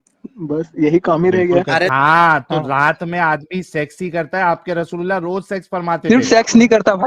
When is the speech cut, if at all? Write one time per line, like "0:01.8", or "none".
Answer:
0:01.9